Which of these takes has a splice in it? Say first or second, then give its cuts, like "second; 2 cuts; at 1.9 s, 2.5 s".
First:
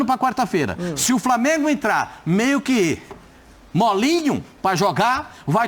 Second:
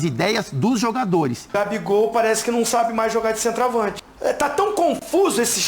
second; 2 cuts; at 1.4 s, 4.0 s